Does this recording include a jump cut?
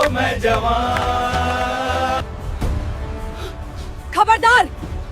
yes; 1 cut; at 2.2 s

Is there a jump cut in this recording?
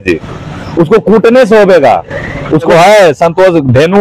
yes; 1 cut; at 2.7 s

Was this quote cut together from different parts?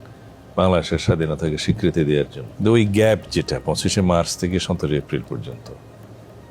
yes; 1 cut; at 2.4 s

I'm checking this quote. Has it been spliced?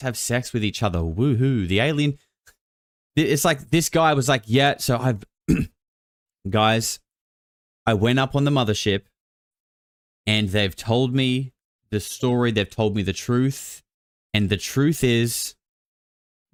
no; 0 cuts

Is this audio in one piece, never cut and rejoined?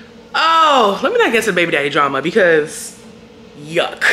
yes; 0 cuts

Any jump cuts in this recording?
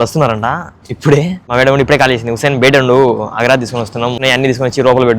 yes; 2 cuts; at 1.4 s, 4.1 s

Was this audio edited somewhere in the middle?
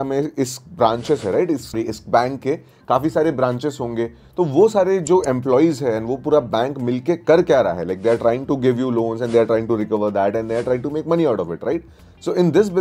no; 0 cuts

